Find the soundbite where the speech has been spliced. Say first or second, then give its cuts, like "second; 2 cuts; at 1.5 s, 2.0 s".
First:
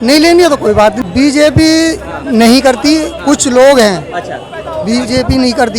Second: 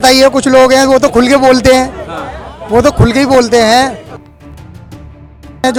first; 1 cut; at 1.0 s